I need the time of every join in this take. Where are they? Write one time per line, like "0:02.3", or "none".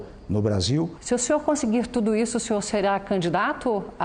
0:01.0